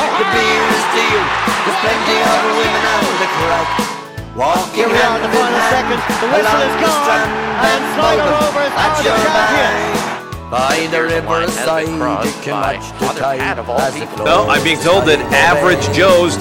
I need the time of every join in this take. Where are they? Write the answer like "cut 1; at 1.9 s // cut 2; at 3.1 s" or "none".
none